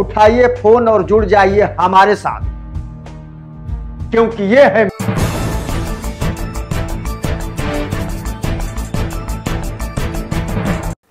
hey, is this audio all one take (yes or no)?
no